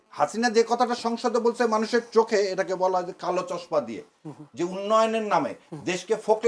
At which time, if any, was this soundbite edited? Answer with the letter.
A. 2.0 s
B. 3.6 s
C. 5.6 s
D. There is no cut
D